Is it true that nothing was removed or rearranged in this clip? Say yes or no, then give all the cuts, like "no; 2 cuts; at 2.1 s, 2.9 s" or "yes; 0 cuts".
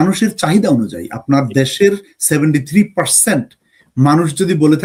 yes; 0 cuts